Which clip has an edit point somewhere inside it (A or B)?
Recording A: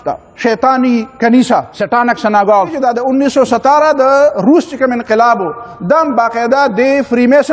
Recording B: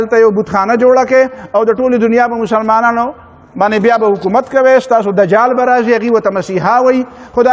A